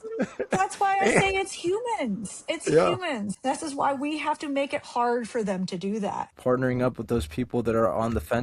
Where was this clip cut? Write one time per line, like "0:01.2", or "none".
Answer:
0:03.3
0:06.2